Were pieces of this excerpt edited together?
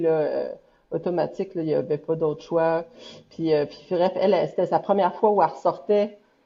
no; 0 cuts

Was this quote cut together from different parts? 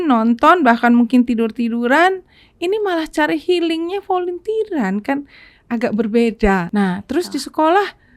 yes; 1 cut; at 6.6 s

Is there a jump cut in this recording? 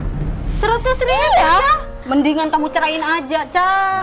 yes; 1 cut; at 1.9 s

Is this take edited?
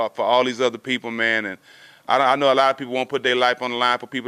no; 0 cuts

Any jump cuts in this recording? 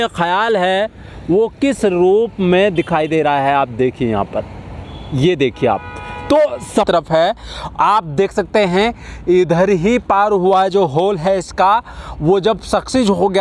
yes; 1 cut; at 6.9 s

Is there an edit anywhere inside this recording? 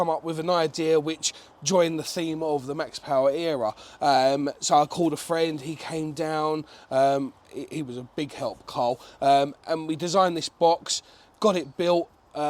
no; 0 cuts

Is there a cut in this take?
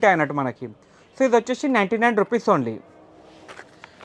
no; 0 cuts

